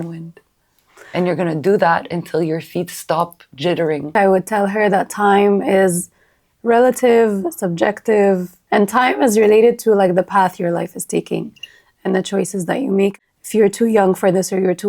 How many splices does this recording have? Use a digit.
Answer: 3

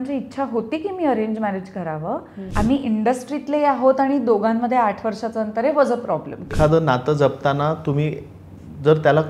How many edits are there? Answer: 2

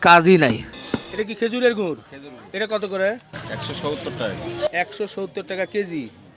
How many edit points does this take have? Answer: 1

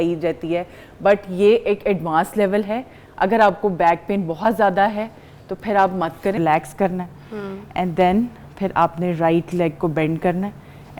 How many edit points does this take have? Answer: 1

